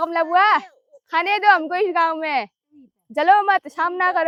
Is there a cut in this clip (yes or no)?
no